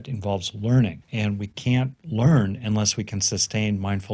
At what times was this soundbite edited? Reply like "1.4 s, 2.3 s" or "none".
1.0 s, 2.0 s